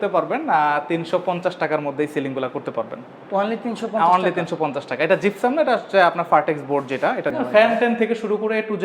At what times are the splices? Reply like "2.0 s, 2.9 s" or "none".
7.3 s